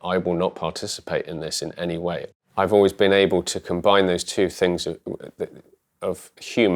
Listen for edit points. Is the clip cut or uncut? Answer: cut